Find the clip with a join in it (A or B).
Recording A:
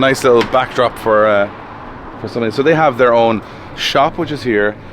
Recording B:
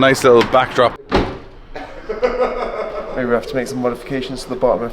B